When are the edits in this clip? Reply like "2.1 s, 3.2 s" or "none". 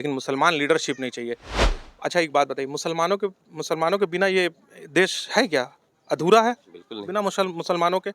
1.7 s